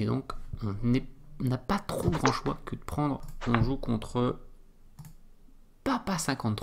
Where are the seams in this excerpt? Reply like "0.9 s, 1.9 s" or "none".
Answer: 3.3 s

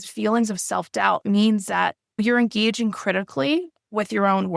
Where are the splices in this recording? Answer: 2.2 s

